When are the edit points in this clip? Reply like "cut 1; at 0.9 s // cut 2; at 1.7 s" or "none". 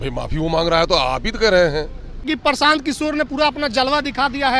cut 1; at 2.3 s